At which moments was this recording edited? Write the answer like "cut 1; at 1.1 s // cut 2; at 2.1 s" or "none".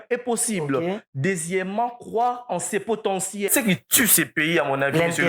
cut 1; at 3.5 s